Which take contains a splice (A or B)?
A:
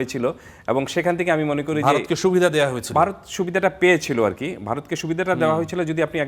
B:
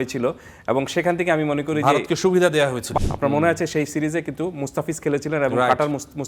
B